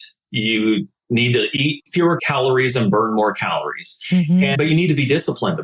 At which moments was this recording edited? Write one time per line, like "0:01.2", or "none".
0:02.2
0:04.5